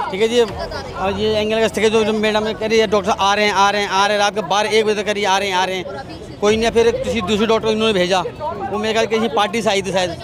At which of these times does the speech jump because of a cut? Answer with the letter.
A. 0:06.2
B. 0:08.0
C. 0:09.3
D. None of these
D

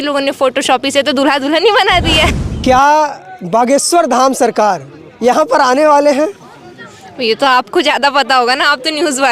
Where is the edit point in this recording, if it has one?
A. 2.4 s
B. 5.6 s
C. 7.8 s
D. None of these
A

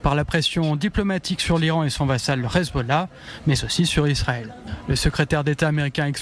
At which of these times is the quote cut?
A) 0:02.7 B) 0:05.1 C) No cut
B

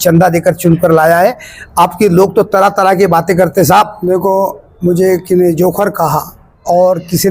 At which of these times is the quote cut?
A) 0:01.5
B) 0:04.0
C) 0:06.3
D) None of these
B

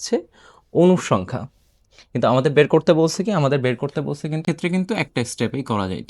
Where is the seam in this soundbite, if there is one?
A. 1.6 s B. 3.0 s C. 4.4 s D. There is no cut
C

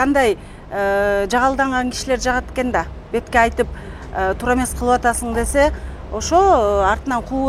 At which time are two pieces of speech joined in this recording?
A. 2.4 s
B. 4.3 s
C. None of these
C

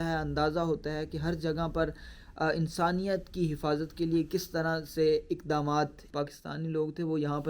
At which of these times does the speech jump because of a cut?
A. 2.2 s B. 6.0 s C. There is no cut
B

